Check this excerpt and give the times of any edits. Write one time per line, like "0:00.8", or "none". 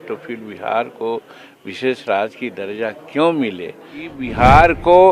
0:04.2